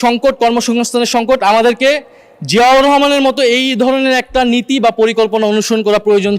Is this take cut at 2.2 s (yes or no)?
no